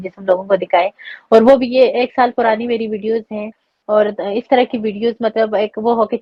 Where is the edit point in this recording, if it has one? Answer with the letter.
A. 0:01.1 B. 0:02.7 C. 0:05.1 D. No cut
D